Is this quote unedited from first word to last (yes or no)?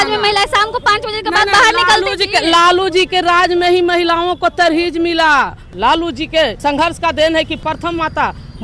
no